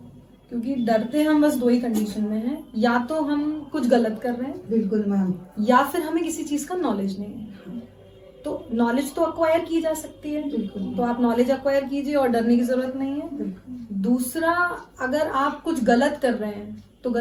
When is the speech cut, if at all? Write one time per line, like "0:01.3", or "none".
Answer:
none